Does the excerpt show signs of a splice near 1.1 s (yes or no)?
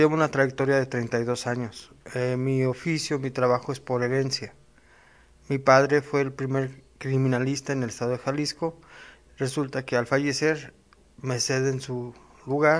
yes